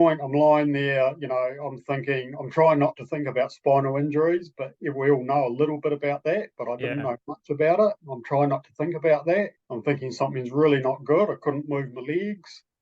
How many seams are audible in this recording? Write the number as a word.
one